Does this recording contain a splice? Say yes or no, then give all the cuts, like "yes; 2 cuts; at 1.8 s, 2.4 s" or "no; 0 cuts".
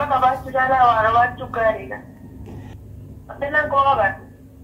yes; 1 cut; at 2.8 s